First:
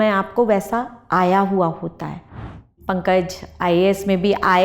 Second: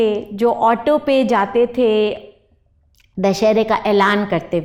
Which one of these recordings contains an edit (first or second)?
first